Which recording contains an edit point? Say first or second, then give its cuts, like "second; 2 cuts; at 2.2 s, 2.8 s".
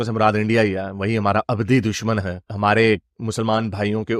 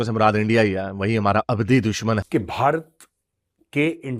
second; 1 cut; at 2.2 s